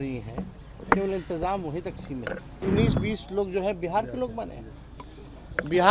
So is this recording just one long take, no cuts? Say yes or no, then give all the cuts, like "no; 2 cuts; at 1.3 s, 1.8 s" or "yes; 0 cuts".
no; 1 cut; at 2.6 s